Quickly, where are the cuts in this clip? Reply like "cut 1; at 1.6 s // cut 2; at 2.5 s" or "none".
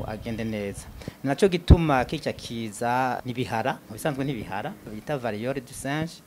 cut 1; at 3.2 s // cut 2; at 4.9 s